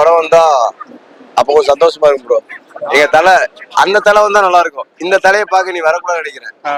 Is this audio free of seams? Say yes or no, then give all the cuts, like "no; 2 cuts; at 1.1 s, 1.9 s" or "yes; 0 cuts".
yes; 0 cuts